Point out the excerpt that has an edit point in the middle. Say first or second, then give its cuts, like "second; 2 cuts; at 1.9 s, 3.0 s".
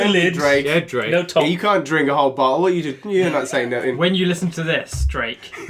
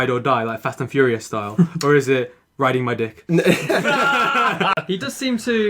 second; 1 cut; at 4.8 s